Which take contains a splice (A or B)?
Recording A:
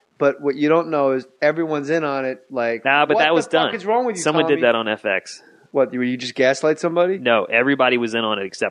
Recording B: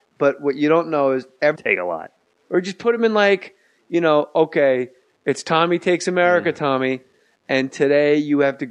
A